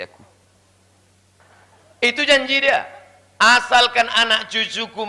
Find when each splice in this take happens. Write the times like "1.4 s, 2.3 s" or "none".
1.3 s